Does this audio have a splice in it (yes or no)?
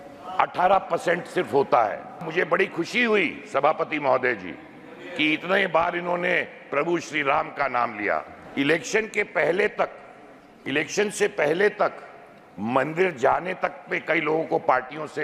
yes